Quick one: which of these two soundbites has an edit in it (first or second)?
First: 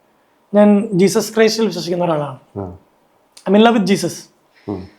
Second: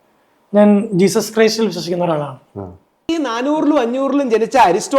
second